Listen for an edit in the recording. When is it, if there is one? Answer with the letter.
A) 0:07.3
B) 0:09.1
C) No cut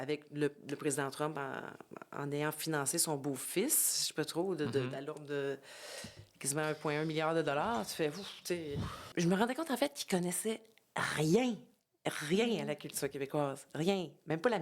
B